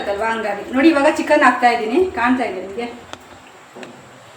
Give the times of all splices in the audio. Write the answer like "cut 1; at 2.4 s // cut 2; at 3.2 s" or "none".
none